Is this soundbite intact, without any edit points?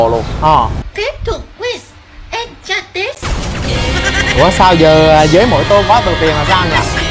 yes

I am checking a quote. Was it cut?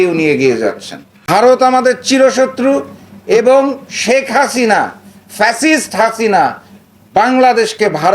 yes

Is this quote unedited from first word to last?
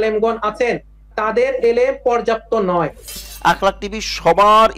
no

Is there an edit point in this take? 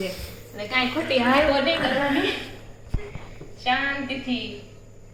no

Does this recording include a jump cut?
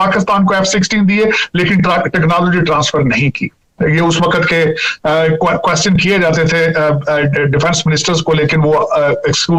no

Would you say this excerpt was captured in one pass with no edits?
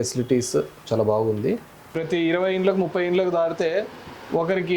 no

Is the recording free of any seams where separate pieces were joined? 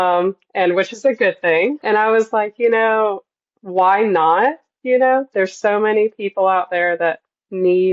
no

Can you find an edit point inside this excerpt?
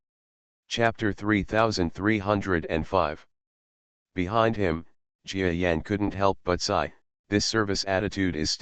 yes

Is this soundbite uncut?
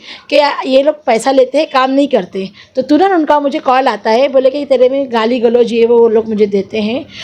yes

